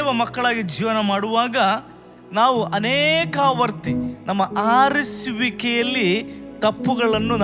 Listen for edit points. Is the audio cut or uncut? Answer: cut